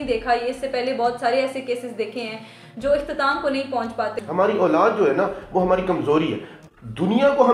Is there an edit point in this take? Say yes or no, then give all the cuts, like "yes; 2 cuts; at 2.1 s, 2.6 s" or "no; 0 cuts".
yes; 1 cut; at 4.1 s